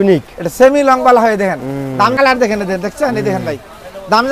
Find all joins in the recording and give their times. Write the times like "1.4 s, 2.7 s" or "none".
2.1 s